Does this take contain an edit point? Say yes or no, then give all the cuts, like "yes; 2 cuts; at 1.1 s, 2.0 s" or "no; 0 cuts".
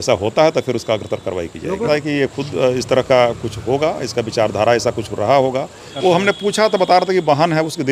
yes; 2 cuts; at 1.9 s, 5.8 s